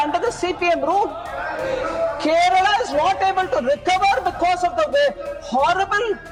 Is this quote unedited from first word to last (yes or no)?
yes